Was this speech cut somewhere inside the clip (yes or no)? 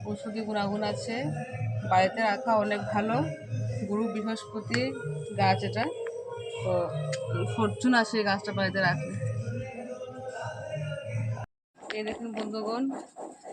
yes